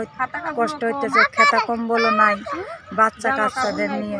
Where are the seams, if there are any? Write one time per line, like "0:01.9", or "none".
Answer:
none